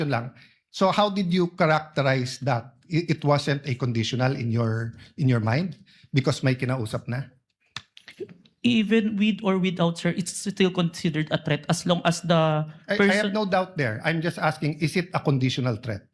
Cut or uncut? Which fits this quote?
uncut